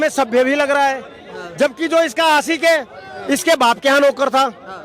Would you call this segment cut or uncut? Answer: uncut